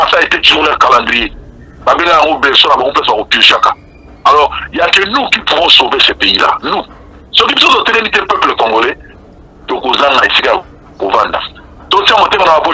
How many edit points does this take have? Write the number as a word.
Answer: zero